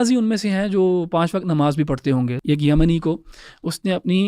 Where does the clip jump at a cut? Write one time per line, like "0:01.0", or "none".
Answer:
0:02.4